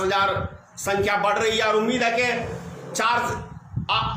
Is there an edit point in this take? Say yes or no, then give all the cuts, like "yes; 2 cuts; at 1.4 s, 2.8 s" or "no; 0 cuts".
no; 0 cuts